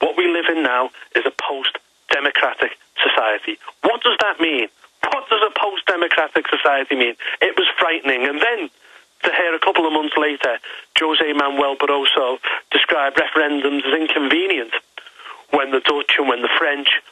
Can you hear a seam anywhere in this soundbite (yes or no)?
no